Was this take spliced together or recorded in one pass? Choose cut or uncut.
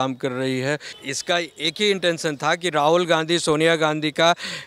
cut